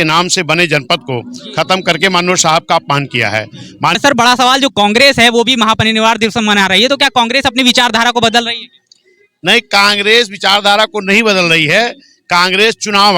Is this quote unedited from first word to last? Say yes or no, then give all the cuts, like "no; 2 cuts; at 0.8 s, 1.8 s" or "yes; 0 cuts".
no; 1 cut; at 4.0 s